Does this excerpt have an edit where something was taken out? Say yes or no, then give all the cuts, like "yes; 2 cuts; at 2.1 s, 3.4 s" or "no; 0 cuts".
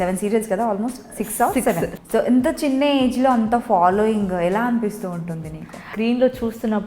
yes; 2 cuts; at 2.0 s, 5.9 s